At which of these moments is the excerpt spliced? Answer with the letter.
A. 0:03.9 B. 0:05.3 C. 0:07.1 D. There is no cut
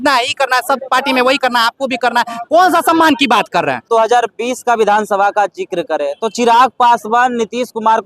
A